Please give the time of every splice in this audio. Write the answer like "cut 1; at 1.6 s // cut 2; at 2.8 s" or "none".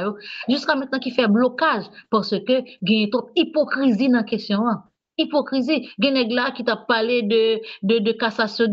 none